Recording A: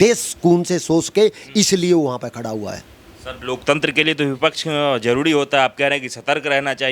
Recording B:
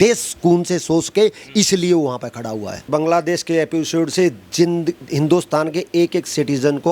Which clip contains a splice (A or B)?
B